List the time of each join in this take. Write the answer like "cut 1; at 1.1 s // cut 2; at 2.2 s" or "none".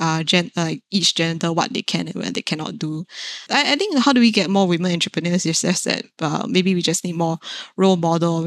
cut 1; at 3.3 s